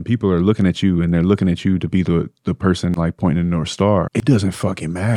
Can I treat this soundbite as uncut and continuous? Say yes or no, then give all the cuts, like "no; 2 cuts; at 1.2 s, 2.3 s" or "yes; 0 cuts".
no; 1 cut; at 4.1 s